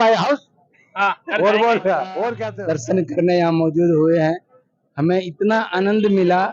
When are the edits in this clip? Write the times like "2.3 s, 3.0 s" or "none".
2.4 s